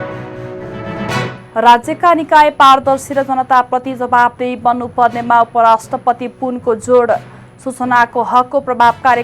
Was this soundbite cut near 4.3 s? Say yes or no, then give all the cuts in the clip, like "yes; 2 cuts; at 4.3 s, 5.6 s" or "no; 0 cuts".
no; 1 cut; at 1.2 s